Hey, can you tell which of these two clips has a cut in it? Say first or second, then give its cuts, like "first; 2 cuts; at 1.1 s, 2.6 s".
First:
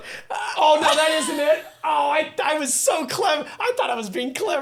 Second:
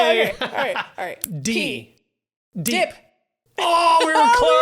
second; 1 cut; at 1.2 s